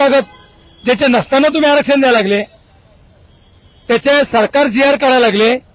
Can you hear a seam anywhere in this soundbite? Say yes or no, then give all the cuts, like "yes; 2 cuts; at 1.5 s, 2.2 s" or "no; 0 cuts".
no; 0 cuts